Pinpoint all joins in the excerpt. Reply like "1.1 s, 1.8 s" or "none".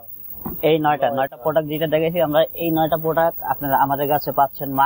none